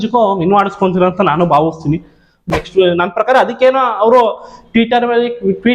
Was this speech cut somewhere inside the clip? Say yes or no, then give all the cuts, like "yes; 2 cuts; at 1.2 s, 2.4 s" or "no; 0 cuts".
yes; 1 cut; at 2.5 s